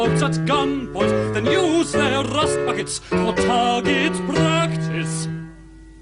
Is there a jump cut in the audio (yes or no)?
no